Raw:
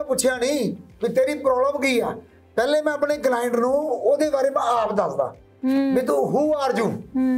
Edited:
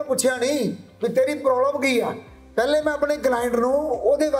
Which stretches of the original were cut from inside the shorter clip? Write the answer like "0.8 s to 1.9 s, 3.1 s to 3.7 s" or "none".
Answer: none